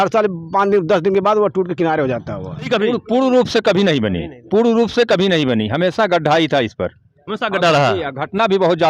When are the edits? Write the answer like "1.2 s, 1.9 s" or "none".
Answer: 2.7 s